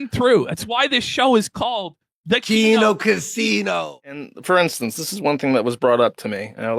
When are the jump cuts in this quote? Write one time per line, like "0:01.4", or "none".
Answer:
0:04.3